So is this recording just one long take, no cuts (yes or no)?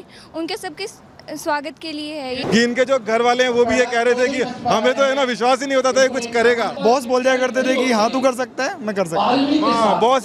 no